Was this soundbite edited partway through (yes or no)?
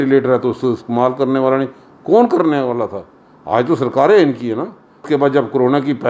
yes